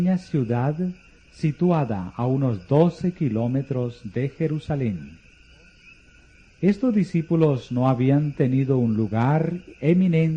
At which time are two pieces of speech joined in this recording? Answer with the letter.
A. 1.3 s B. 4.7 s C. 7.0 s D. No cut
B